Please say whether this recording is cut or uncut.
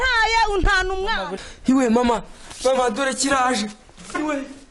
cut